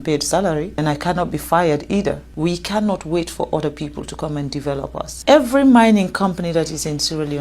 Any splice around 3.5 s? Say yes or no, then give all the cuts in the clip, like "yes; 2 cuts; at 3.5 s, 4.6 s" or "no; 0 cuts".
no; 3 cuts; at 0.8 s, 2.3 s, 5.1 s